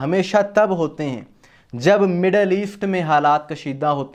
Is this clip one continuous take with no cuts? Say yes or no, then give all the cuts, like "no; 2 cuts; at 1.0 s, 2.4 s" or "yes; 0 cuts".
yes; 0 cuts